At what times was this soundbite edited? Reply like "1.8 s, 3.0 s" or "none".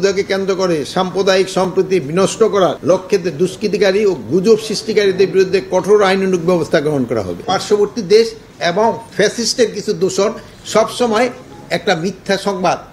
2.8 s, 7.5 s